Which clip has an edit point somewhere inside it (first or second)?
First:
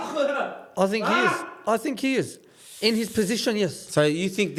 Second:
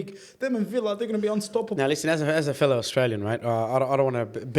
second